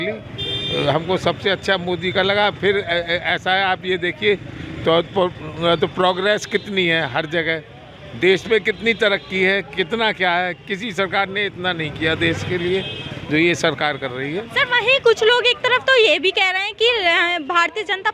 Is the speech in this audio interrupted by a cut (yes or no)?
no